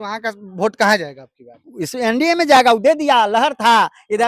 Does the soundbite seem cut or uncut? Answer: uncut